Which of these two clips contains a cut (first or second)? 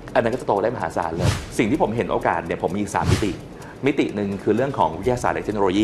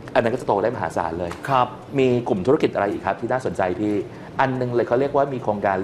first